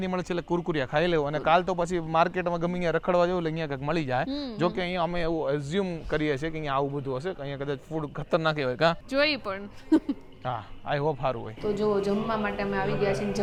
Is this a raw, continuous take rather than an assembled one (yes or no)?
yes